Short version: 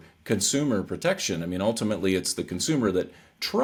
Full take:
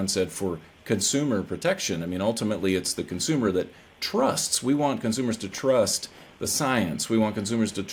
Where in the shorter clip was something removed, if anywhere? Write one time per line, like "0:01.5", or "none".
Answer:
none